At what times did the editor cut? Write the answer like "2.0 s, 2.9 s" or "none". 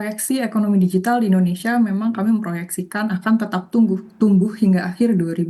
none